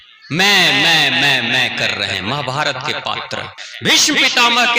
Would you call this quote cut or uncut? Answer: cut